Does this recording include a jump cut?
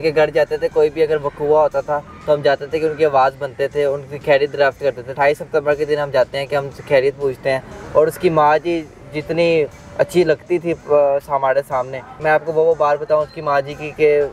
yes; 3 cuts; at 5.1 s, 7.8 s, 12.2 s

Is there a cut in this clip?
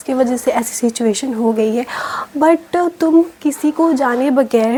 no; 0 cuts

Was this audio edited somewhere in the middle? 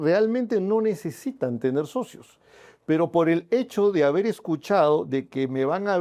no; 0 cuts

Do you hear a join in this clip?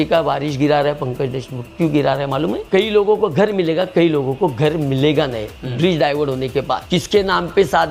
yes; 2 cuts; at 2.7 s, 6.8 s

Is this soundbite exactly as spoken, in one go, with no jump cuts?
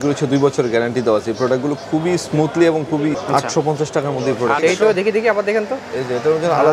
no; 2 cuts; at 3.1 s, 4.6 s

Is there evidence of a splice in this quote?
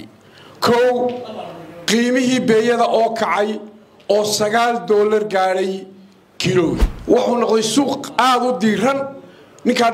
yes; 1 cut; at 6.9 s

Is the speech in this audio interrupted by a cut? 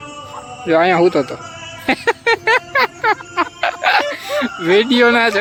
no; 0 cuts

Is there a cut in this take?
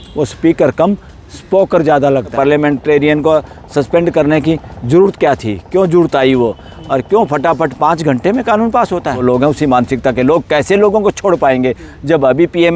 yes; 2 cuts; at 2.3 s, 9.2 s

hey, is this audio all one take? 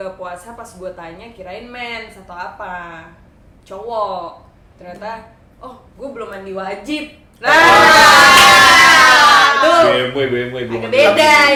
yes; 0 cuts

